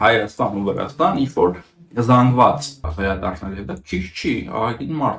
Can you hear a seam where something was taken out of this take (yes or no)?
yes